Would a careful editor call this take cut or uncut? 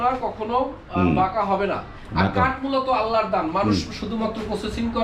uncut